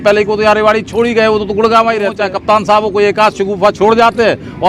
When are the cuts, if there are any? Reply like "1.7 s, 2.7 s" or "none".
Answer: 2.3 s